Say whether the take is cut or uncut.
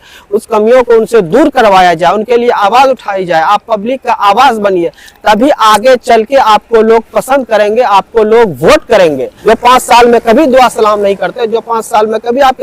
cut